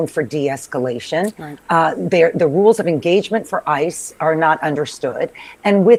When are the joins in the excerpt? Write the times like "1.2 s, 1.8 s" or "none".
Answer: none